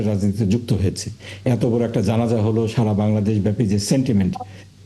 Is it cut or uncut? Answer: uncut